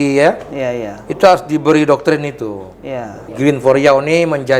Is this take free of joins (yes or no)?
no